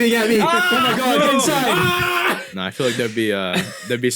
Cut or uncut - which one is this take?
cut